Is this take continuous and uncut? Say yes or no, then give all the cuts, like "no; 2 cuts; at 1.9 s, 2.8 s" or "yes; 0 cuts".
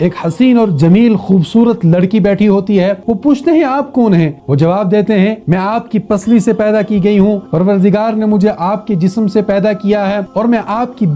yes; 0 cuts